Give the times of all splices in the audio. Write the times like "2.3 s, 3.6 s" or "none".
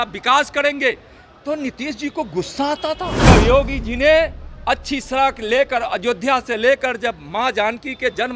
3.3 s